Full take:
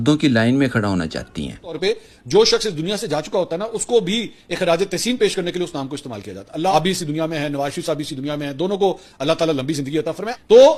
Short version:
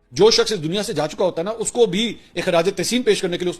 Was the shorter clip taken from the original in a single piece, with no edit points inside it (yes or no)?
yes